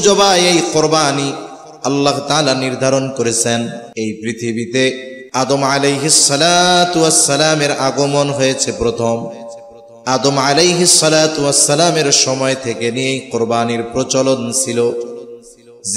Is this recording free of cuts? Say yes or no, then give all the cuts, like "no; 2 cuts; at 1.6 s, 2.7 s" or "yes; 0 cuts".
no; 2 cuts; at 3.8 s, 5.1 s